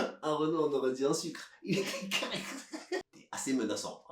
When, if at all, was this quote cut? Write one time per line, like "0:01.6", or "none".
0:03.1